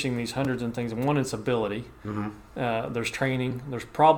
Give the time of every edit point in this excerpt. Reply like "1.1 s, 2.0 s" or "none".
none